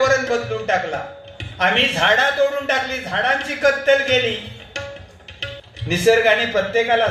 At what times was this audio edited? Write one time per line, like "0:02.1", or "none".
0:05.7